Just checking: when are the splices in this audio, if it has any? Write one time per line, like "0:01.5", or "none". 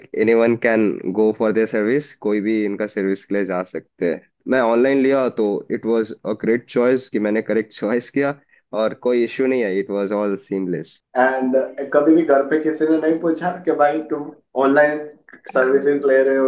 0:04.4
0:11.0